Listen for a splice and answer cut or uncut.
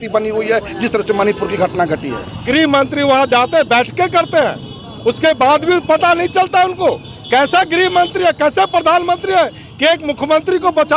cut